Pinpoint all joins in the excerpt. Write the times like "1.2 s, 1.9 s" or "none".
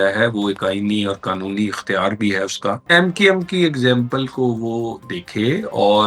2.8 s